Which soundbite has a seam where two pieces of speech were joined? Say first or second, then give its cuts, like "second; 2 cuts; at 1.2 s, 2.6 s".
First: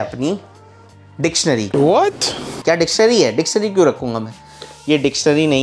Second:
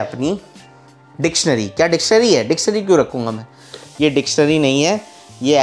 second; 1 cut; at 1.7 s